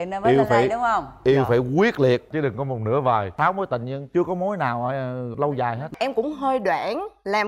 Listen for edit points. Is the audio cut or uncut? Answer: cut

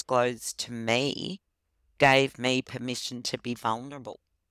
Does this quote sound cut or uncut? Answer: uncut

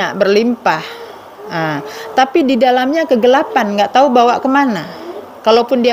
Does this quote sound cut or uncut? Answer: uncut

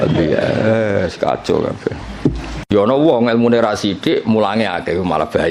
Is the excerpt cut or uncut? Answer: cut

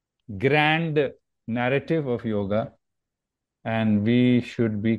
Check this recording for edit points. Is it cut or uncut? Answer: uncut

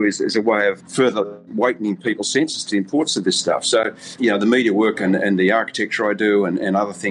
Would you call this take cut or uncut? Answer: cut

